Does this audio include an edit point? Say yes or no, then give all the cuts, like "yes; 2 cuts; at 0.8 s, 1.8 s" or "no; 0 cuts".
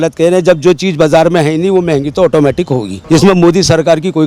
yes; 1 cut; at 2.9 s